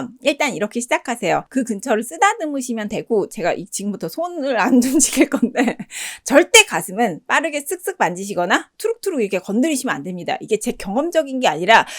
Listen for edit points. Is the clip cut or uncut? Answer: cut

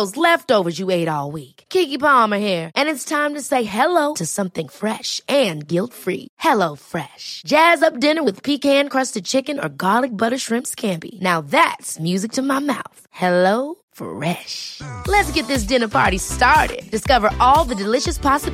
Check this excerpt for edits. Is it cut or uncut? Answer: uncut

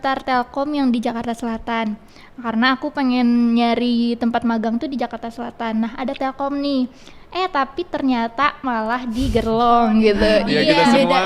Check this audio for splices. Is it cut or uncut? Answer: uncut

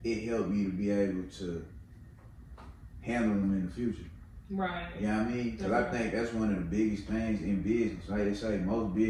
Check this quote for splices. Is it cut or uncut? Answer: uncut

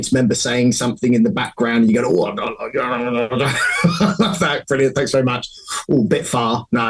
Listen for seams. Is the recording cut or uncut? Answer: uncut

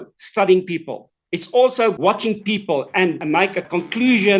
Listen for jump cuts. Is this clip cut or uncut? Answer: cut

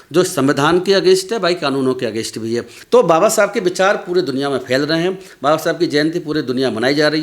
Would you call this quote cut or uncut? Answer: cut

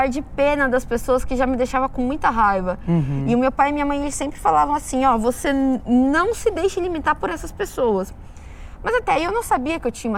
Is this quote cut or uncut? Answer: uncut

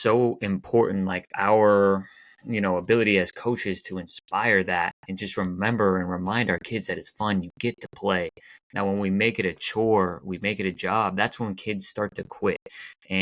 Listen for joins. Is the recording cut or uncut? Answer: uncut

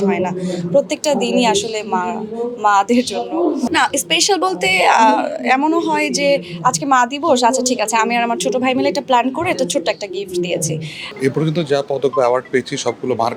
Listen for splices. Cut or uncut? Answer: uncut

